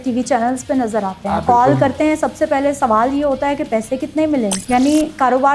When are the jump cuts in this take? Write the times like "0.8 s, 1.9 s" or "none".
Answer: 4.6 s